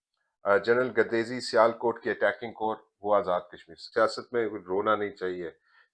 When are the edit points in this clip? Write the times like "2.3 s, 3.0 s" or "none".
3.8 s